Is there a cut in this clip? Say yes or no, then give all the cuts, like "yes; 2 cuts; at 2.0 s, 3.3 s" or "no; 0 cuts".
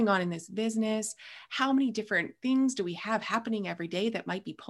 no; 0 cuts